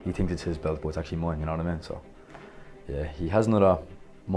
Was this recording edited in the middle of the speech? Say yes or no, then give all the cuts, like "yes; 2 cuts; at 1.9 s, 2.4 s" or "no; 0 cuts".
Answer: no; 0 cuts